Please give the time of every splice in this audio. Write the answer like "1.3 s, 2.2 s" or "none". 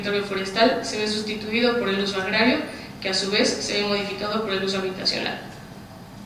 2.0 s